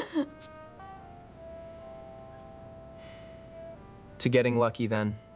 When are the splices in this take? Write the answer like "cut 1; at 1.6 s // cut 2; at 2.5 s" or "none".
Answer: cut 1; at 0.8 s // cut 2; at 3.8 s

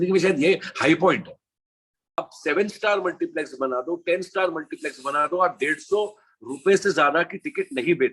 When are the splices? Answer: cut 1; at 2.2 s

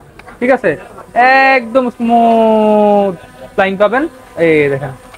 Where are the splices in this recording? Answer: none

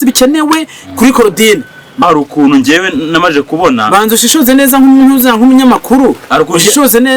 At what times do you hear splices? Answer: cut 1; at 2.0 s

